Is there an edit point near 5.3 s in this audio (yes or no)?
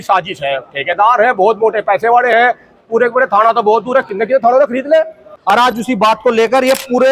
yes